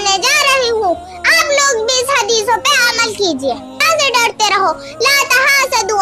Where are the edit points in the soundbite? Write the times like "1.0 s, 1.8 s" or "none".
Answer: 3.8 s